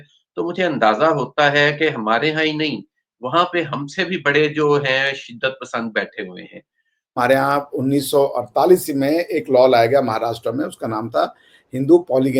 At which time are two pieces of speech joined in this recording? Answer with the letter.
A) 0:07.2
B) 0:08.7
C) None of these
A